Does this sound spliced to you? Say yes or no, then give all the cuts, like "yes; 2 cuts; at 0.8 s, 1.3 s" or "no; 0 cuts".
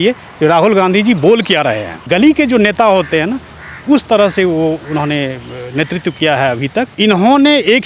yes; 2 cuts; at 2.0 s, 6.9 s